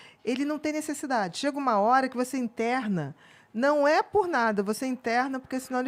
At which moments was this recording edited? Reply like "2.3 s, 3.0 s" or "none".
none